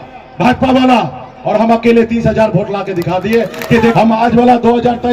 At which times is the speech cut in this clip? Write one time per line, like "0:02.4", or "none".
0:03.9

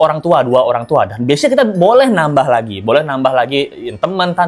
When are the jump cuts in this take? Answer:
none

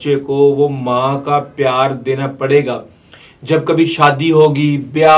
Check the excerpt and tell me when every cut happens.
none

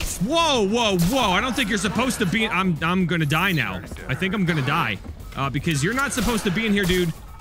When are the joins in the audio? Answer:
none

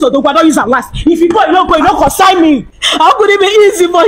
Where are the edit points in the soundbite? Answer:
0:02.8

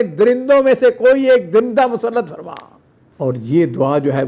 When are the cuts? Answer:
none

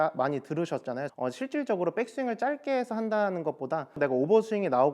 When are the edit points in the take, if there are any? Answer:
0:01.1
0:04.0

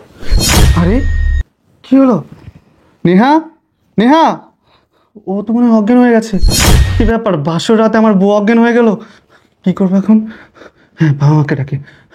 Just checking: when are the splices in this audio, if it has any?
none

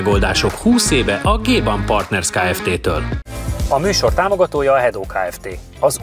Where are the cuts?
none

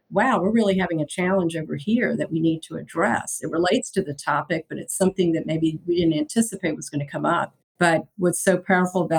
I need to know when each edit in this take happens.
0:07.6

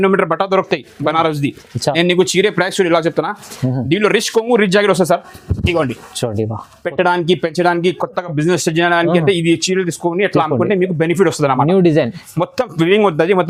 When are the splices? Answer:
none

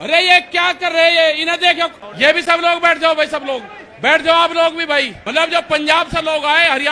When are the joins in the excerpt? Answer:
0:05.2

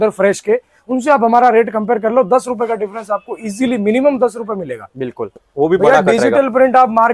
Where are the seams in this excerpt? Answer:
0:05.4

